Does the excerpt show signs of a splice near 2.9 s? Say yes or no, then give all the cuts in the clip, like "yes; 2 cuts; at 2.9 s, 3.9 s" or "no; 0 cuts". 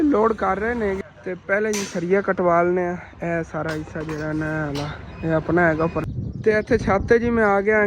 no; 2 cuts; at 1.0 s, 6.0 s